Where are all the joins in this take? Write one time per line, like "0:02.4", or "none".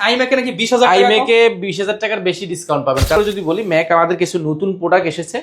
0:03.2